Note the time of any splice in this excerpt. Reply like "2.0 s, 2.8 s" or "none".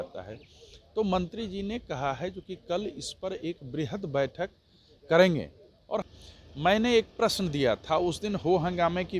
6.1 s